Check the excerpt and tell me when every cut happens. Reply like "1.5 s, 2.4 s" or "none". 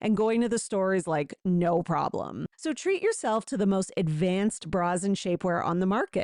2.4 s